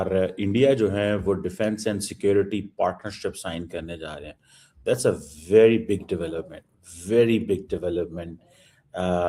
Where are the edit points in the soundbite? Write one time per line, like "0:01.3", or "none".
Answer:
none